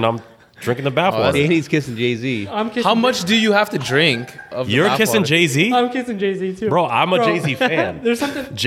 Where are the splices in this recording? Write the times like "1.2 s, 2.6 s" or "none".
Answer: none